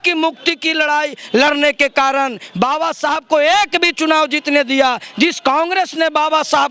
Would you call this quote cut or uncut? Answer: uncut